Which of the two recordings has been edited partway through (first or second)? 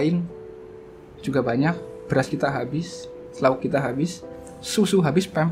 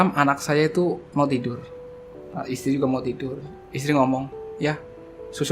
second